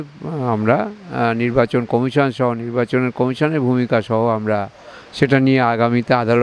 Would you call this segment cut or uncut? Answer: uncut